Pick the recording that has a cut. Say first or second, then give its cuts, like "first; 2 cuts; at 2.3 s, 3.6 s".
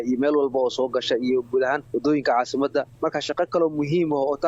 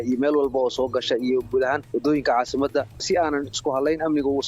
second; 1 cut; at 3.0 s